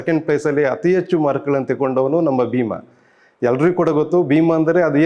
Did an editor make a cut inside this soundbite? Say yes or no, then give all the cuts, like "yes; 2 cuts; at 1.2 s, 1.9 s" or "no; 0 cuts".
no; 0 cuts